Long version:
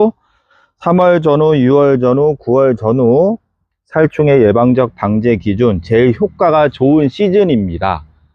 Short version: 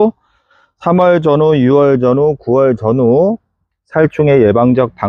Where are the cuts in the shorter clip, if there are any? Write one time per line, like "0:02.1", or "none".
none